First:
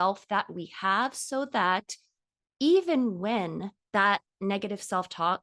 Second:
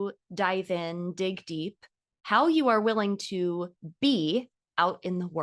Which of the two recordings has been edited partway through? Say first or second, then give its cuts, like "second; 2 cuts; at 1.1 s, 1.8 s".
first; 1 cut; at 3.7 s